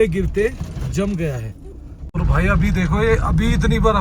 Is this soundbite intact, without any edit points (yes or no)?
no